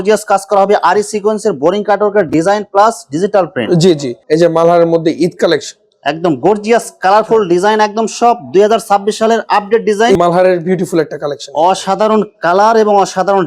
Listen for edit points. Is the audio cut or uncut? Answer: cut